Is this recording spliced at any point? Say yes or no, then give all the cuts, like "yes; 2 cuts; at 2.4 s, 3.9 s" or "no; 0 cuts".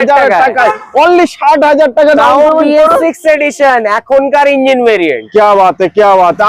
no; 0 cuts